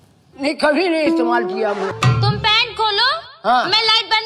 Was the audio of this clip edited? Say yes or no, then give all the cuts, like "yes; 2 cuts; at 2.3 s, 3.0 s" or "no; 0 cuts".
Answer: yes; 1 cut; at 1.9 s